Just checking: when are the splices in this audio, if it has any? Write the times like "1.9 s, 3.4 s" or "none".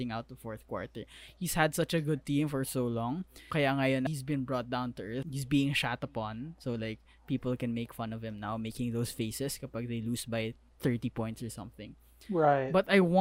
3.4 s, 4.1 s, 5.3 s